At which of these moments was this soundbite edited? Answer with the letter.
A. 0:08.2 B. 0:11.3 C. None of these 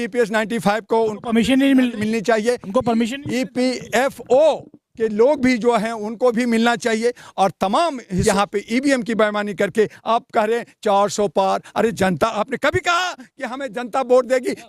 A